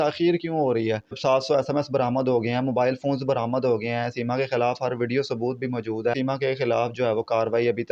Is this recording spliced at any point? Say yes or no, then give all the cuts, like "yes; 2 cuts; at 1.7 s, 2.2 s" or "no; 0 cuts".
yes; 2 cuts; at 1.2 s, 6.1 s